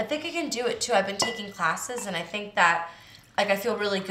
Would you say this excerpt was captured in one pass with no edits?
yes; 0 cuts

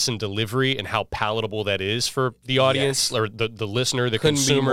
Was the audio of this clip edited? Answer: no; 0 cuts

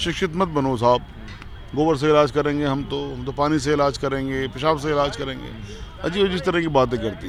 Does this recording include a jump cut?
no; 0 cuts

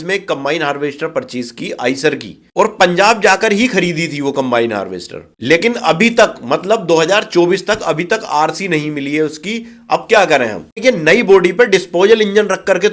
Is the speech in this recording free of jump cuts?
no; 1 cut; at 10.8 s

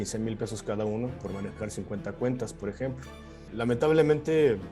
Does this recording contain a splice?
yes; 1 cut; at 3.4 s

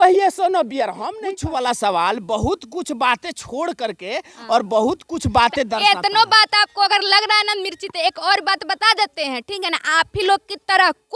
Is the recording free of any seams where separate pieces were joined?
no; 1 cut; at 1.1 s

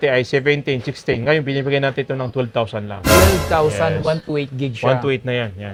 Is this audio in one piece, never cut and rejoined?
yes; 0 cuts

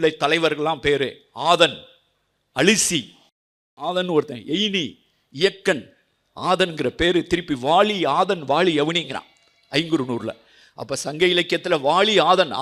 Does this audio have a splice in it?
no; 0 cuts

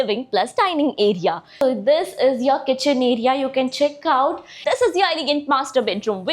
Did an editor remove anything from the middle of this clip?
yes; 2 cuts; at 1.6 s, 4.5 s

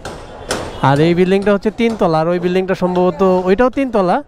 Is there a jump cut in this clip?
no; 0 cuts

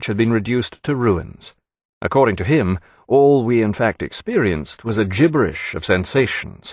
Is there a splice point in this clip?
yes; 1 cut; at 2.5 s

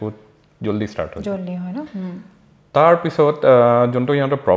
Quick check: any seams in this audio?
no; 0 cuts

